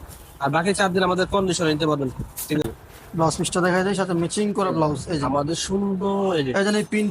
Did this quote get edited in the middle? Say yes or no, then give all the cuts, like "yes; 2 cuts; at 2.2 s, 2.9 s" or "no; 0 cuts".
yes; 1 cut; at 2.7 s